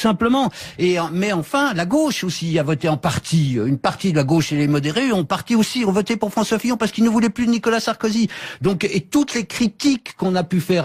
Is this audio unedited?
yes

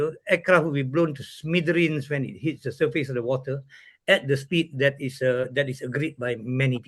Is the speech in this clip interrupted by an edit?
no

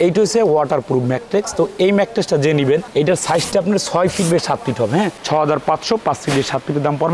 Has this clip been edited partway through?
no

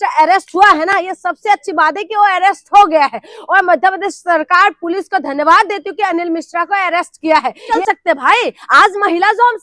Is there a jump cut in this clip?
yes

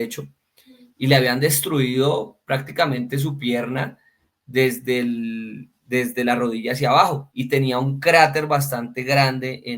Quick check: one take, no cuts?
no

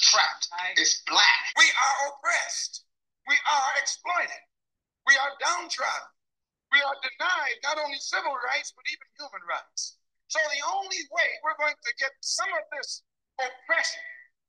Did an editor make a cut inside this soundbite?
yes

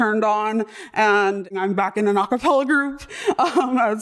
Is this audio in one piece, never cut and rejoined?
no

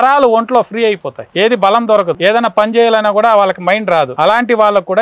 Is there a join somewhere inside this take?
yes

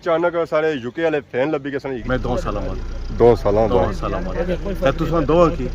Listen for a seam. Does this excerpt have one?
yes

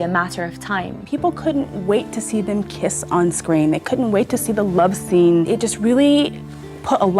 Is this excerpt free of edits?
no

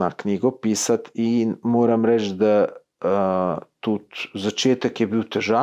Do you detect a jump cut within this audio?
no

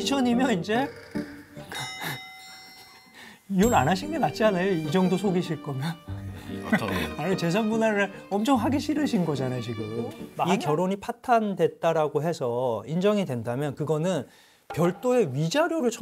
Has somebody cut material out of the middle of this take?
yes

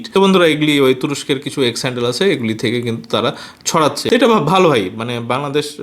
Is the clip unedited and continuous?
yes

